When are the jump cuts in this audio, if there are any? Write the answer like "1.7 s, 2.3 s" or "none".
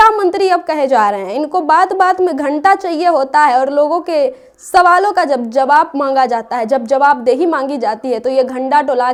none